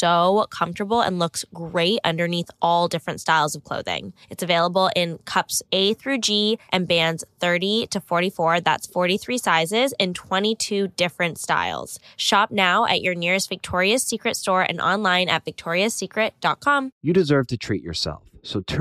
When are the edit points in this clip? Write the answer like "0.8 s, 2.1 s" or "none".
16.9 s